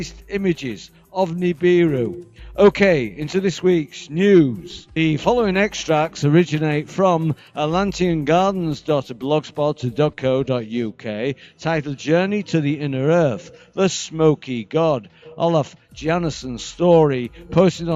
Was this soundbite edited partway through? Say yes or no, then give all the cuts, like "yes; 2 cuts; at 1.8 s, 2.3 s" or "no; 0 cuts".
no; 0 cuts